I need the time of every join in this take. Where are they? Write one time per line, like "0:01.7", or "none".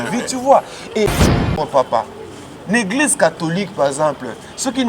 0:01.2